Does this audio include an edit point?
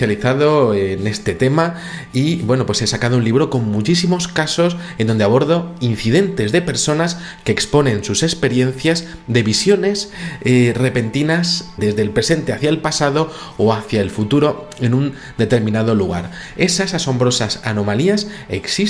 no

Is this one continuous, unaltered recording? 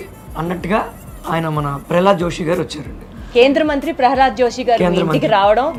yes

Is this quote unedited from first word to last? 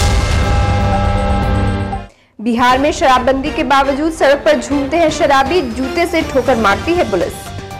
no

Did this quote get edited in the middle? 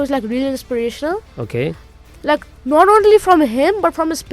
no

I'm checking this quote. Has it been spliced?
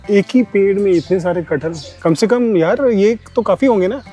no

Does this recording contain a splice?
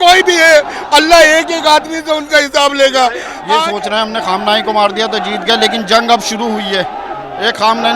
yes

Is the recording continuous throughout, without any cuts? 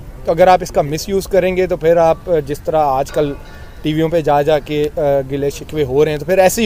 yes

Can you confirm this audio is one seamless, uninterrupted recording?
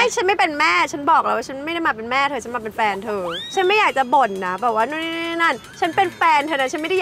yes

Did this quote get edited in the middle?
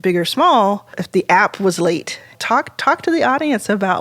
no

